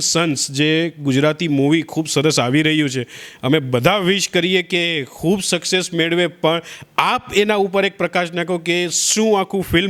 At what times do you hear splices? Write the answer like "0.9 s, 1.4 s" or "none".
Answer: none